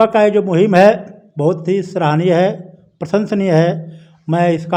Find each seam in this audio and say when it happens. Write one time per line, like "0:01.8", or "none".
none